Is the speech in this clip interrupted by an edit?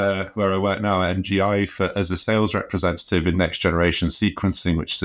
no; 0 cuts

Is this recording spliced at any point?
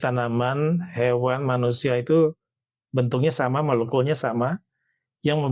no; 0 cuts

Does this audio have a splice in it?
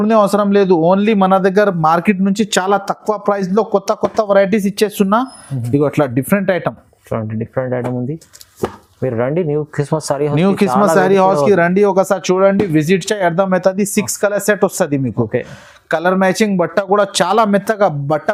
no; 0 cuts

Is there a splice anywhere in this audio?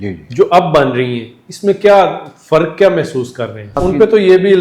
yes; 1 cut; at 3.7 s

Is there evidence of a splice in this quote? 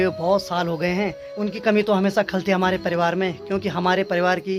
no; 0 cuts

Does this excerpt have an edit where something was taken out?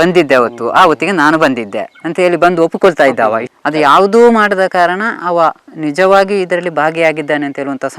yes; 1 cut; at 3.5 s

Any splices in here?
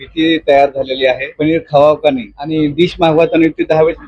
yes; 2 cuts; at 1.3 s, 2.3 s

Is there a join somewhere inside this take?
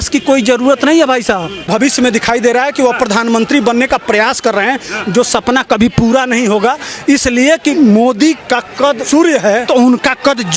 yes; 4 cuts; at 1.7 s, 7.7 s, 9.0 s, 9.6 s

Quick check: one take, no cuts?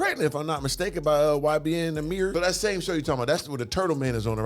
no; 1 cut; at 2.3 s

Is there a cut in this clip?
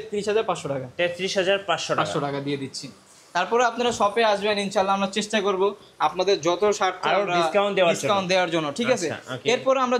no; 0 cuts

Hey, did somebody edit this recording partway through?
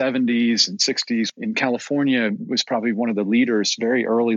yes; 1 cut; at 1.3 s

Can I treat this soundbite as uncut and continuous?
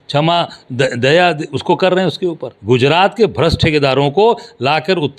no; 1 cut; at 2.5 s

